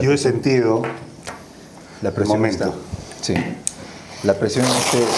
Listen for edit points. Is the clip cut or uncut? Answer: uncut